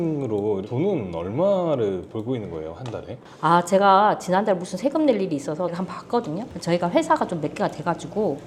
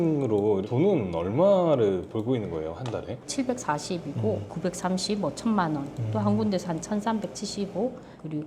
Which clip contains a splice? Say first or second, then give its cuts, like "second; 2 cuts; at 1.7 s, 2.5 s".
second; 2 cuts; at 3.2 s, 4.5 s